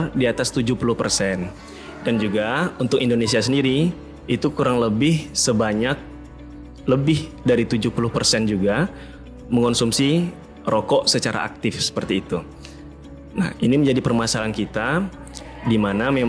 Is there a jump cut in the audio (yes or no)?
no